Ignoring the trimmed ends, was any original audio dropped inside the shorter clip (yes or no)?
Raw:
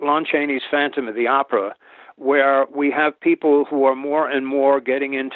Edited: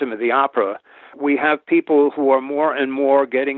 yes